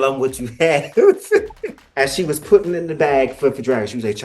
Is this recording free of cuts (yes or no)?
no